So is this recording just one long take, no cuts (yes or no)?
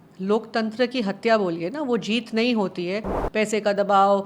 no